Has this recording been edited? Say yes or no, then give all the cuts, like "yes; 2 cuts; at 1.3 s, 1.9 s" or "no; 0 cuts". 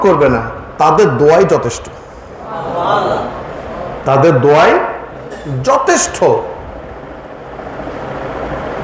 no; 0 cuts